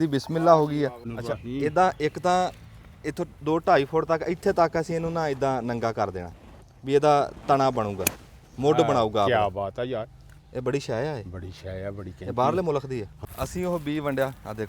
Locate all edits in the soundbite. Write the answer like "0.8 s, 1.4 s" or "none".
1.1 s, 13.1 s